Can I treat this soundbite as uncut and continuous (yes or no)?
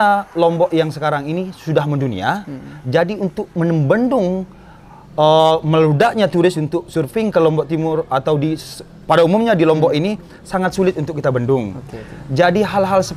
yes